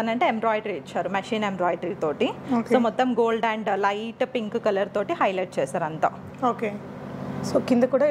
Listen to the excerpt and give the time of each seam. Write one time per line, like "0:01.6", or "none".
none